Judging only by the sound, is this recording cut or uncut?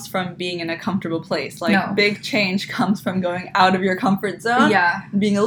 uncut